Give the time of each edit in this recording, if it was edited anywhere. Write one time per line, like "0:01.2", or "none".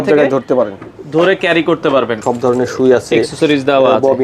0:02.2